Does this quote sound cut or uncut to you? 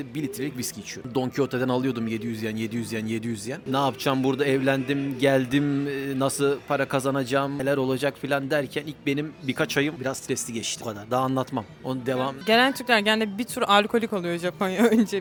uncut